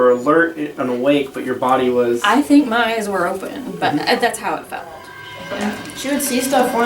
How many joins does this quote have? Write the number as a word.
one